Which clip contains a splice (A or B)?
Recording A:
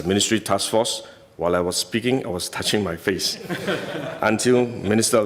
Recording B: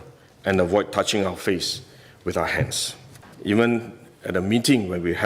B